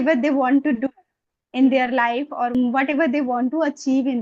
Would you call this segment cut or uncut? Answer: cut